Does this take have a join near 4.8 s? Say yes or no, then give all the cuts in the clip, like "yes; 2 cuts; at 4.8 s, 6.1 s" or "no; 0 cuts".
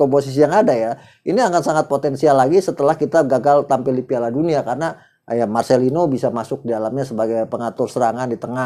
no; 0 cuts